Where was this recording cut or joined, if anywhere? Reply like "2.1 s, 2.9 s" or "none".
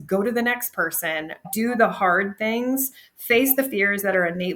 1.4 s